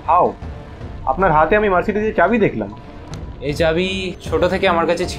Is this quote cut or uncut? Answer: cut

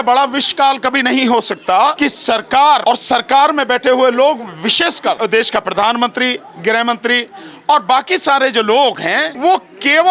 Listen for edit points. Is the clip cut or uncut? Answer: cut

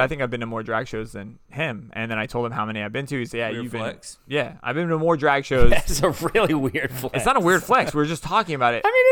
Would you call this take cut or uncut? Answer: uncut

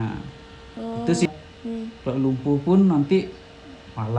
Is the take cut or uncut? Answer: cut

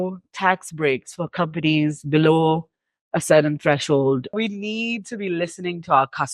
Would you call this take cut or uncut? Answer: cut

